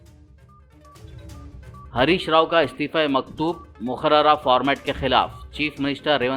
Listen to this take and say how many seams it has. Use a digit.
1